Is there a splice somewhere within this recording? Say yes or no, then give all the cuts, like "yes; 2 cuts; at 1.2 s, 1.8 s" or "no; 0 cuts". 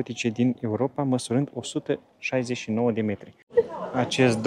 yes; 1 cut; at 3.3 s